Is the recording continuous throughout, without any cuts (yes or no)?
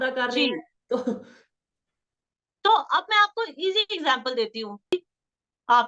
no